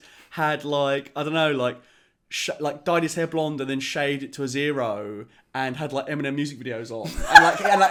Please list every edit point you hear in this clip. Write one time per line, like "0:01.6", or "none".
none